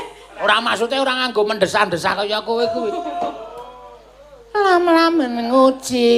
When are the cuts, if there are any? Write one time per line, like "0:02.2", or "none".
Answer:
0:01.0

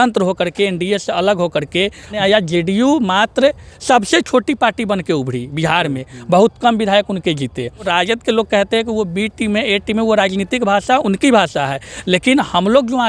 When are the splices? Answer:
0:02.1
0:07.9

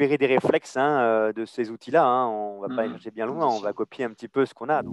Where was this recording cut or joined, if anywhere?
none

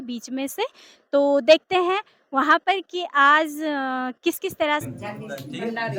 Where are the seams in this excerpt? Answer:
0:04.8

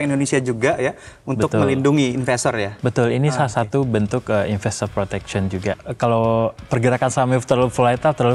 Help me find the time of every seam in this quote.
0:05.8

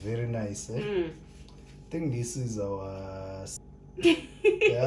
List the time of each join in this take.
0:03.5

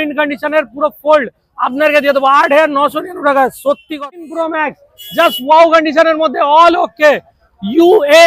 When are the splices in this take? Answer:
0:03.9

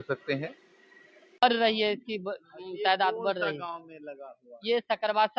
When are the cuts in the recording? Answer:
0:01.4

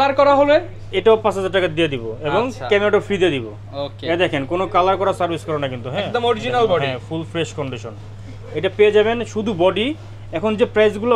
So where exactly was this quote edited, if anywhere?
none

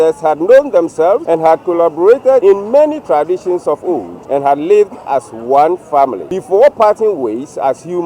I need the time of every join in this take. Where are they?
0:01.2
0:02.4
0:04.1
0:06.3

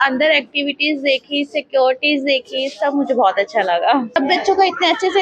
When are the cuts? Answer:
0:04.2

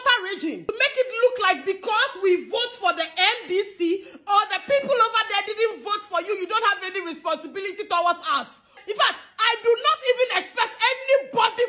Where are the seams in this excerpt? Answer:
0:00.7
0:08.8

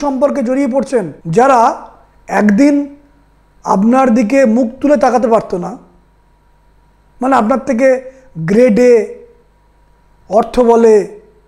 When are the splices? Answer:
0:01.1

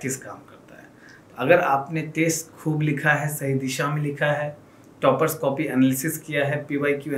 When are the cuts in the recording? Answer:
none

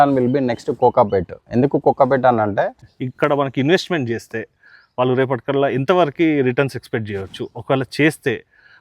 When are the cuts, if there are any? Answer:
0:02.8

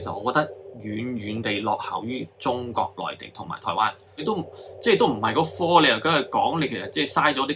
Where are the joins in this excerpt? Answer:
0:04.2

